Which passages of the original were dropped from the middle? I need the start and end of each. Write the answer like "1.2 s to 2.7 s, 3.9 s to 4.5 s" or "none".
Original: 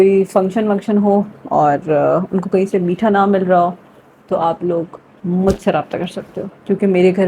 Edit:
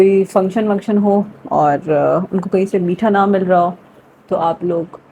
none